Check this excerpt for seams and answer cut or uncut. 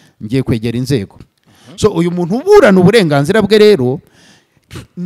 cut